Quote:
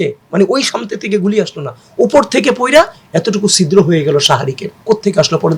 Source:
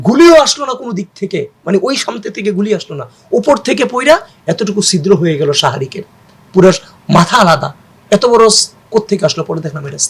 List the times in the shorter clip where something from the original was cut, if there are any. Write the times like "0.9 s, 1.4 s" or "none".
4.7 s